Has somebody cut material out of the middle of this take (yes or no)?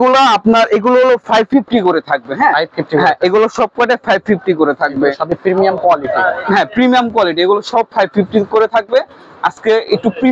no